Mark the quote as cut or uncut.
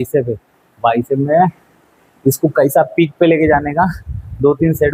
uncut